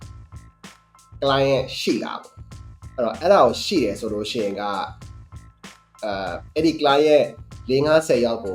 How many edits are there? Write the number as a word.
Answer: zero